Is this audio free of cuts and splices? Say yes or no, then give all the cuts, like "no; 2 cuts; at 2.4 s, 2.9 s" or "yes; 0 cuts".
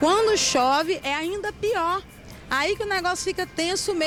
yes; 0 cuts